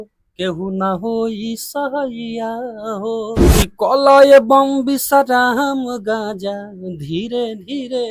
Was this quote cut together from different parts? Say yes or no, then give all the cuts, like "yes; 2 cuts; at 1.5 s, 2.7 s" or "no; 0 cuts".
yes; 1 cut; at 3.5 s